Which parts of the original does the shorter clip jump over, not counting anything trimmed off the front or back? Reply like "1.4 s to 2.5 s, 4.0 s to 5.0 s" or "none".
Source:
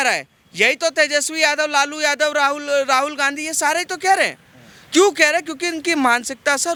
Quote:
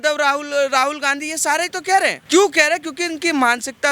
4.4 s to 4.8 s